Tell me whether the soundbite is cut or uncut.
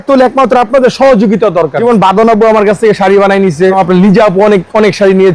cut